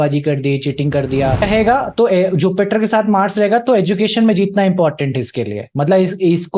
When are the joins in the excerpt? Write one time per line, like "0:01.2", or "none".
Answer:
0:01.4